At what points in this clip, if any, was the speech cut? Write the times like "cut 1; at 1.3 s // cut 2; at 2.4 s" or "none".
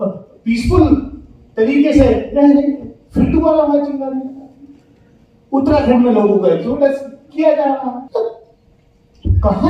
cut 1; at 8.1 s